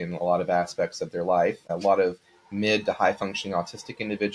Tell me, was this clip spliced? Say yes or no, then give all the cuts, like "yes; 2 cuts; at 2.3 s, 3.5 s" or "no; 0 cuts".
yes; 1 cut; at 1.7 s